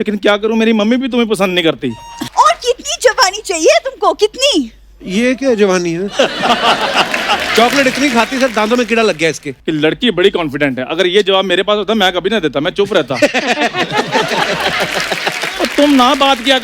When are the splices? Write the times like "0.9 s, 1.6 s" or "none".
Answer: 2.2 s, 9.5 s